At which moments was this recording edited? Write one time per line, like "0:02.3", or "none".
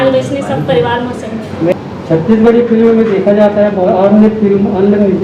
0:01.7